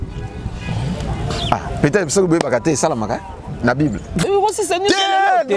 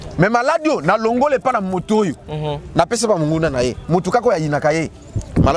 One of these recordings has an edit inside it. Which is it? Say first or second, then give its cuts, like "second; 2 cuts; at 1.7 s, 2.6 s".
first; 1 cut; at 4.2 s